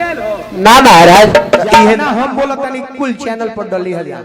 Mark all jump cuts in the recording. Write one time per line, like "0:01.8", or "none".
0:02.0